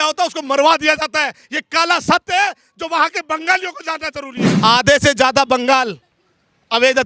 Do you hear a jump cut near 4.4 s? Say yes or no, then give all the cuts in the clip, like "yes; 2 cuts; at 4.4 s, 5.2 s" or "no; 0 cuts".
yes; 1 cut; at 4.4 s